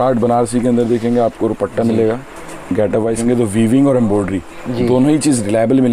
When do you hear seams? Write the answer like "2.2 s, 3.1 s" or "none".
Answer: 3.2 s